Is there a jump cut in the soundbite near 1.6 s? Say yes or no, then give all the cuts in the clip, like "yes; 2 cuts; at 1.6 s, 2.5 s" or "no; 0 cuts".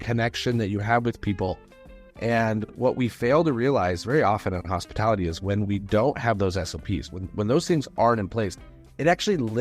no; 0 cuts